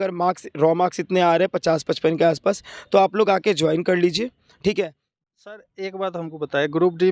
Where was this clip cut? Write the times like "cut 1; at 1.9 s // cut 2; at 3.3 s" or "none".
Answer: cut 1; at 5.0 s